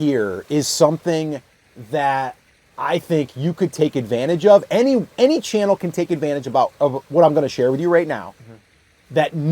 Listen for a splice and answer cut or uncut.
uncut